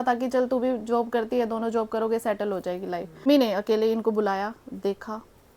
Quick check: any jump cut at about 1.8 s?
no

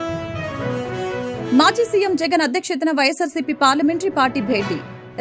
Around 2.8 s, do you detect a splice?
no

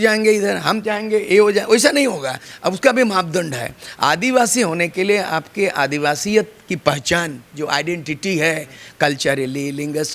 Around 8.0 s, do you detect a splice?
no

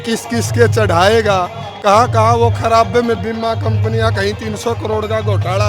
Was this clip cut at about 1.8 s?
no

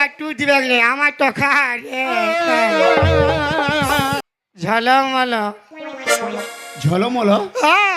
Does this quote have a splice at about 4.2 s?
yes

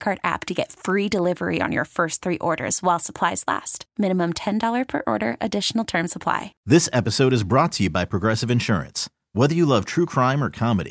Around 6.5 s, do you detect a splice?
yes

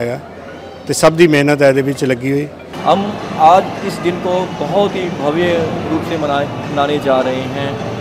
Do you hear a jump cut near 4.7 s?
no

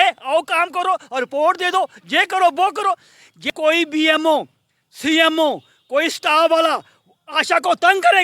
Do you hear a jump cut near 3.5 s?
yes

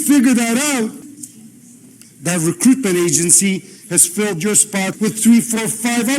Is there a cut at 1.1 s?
yes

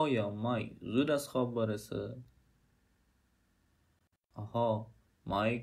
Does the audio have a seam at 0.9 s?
no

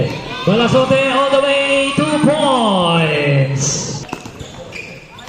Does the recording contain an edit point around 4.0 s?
yes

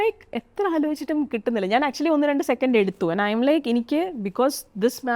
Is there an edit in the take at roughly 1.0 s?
no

